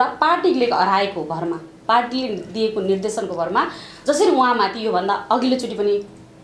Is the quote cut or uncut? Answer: uncut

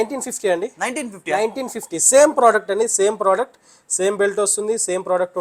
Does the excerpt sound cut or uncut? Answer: uncut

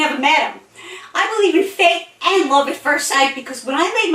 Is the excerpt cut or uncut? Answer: uncut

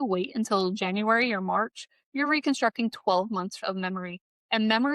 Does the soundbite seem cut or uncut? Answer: uncut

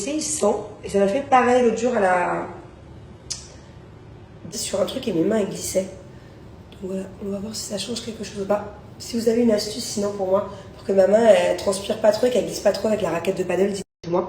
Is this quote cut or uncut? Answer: cut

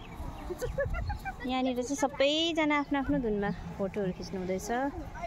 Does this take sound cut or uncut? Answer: uncut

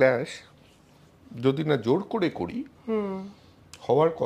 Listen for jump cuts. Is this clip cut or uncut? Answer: uncut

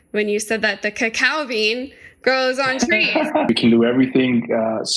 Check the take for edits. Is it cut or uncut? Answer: cut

